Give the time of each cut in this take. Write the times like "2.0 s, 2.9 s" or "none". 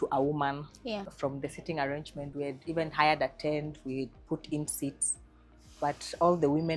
1.1 s